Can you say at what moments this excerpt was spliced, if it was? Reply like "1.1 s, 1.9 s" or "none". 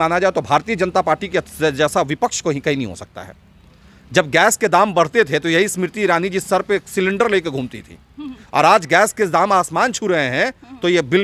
none